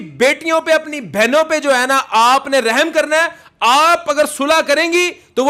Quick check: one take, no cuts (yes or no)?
yes